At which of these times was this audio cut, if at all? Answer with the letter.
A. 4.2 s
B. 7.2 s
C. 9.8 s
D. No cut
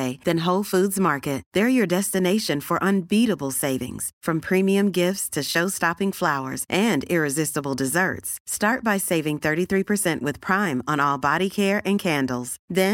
D